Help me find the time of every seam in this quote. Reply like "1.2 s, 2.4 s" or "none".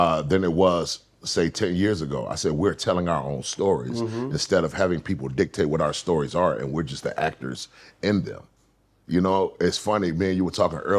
none